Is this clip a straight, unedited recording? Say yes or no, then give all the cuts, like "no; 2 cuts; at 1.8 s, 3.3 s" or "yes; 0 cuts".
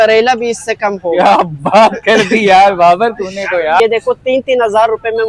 no; 1 cut; at 3.8 s